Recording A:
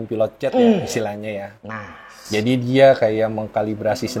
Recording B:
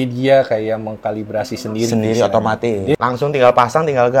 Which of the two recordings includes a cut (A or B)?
B